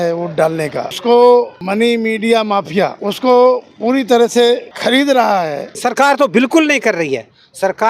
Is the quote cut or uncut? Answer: cut